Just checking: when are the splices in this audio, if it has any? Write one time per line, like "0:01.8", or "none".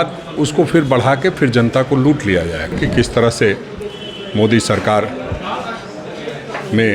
0:02.8